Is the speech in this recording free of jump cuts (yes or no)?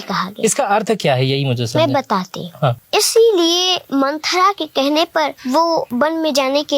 no